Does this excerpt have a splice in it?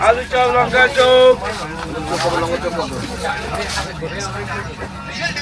no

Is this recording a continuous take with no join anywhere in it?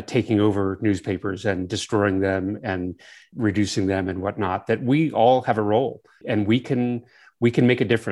no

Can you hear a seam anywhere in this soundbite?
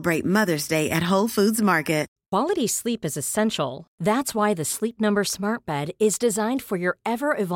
yes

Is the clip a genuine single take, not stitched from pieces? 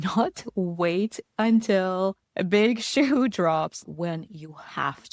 no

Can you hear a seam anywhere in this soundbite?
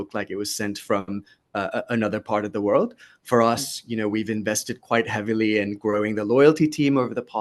no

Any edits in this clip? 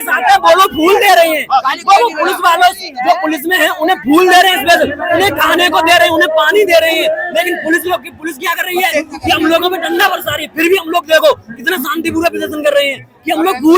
no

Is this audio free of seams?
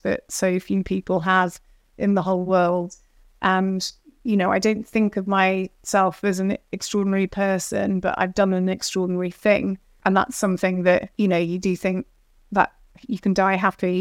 no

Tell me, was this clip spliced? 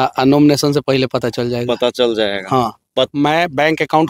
yes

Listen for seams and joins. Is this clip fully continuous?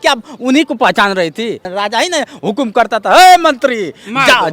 no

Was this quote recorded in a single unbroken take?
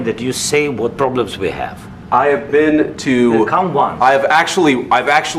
yes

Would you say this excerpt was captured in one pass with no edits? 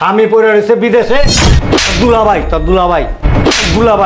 no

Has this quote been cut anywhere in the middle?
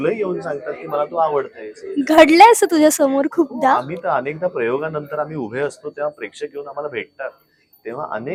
no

